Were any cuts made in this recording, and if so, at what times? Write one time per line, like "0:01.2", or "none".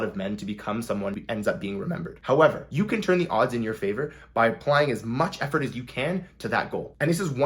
0:01.2